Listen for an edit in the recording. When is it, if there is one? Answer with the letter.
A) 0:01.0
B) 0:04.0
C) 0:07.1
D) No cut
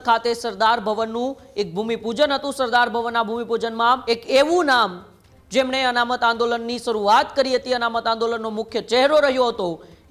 B